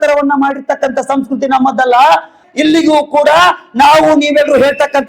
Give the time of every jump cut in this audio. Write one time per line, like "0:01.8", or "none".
0:02.4